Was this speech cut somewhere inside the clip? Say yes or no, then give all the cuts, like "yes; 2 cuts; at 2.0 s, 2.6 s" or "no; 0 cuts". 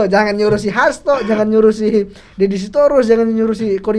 no; 0 cuts